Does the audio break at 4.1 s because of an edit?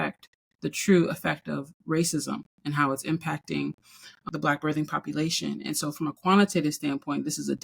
yes; 1 cut; at 4.1 s

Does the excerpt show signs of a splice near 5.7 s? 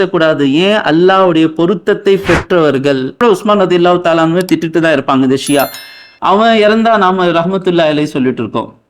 no; 1 cut; at 3.2 s

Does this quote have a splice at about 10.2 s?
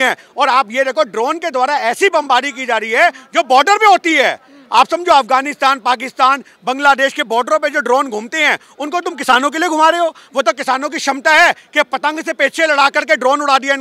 no; 0 cuts

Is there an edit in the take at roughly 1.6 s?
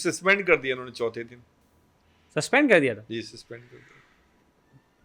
no; 0 cuts

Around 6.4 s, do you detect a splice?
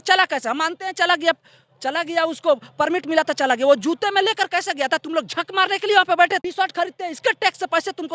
yes; 1 cut; at 6.4 s

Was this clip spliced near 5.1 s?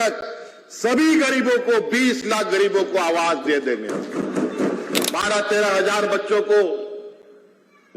yes; 1 cut; at 5.1 s

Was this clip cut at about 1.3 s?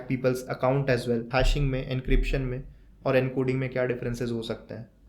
yes; 1 cut; at 1.3 s

